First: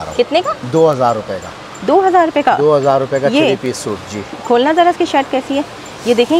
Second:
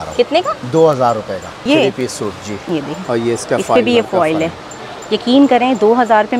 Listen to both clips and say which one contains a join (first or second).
second